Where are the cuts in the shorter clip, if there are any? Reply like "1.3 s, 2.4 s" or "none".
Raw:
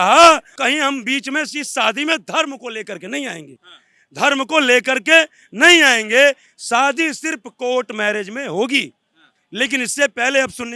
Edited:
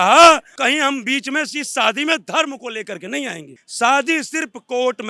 3.6 s